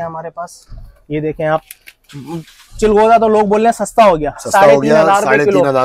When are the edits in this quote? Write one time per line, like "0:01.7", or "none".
none